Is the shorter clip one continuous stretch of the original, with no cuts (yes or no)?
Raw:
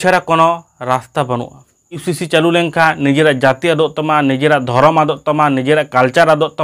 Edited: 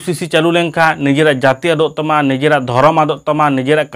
yes